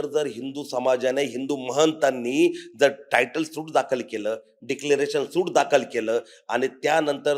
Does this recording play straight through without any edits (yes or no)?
yes